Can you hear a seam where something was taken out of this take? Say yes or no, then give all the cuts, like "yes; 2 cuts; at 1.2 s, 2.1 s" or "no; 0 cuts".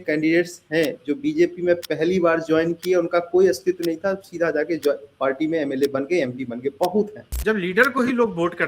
yes; 1 cut; at 7.2 s